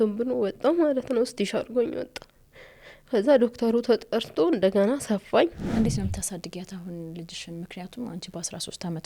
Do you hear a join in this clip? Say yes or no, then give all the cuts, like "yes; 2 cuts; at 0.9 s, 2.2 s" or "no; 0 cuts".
yes; 1 cut; at 5.6 s